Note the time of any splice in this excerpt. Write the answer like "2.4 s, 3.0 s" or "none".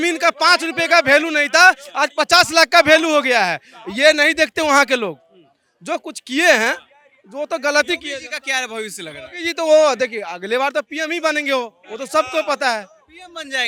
none